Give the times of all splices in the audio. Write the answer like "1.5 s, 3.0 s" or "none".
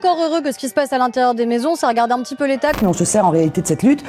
2.8 s